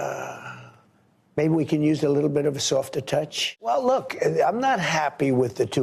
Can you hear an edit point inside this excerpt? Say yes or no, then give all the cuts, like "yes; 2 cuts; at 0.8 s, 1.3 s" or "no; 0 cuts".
yes; 1 cut; at 3.5 s